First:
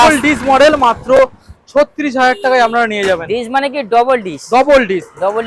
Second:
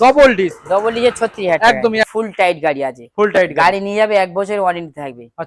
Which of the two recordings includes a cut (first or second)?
second